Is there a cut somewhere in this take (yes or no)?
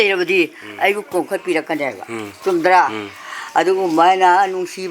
no